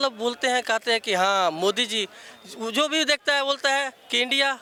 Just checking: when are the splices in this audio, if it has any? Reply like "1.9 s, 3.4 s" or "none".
none